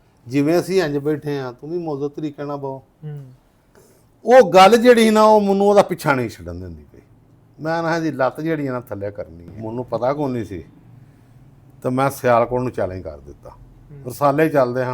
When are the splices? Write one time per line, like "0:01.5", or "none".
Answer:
0:09.6